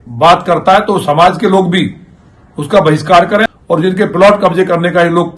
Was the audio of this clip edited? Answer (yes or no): yes